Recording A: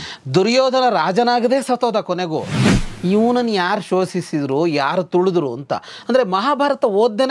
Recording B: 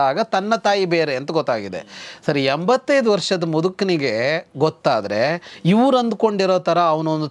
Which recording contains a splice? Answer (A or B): A